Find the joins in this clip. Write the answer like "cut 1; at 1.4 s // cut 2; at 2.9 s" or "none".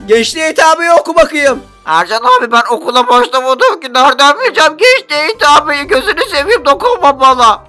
cut 1; at 1.7 s